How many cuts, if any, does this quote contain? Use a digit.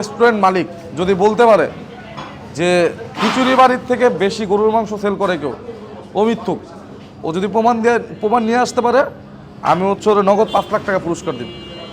0